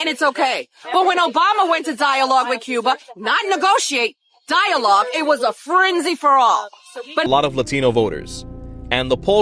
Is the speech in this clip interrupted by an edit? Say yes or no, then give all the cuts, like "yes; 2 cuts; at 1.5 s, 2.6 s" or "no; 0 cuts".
yes; 1 cut; at 7.3 s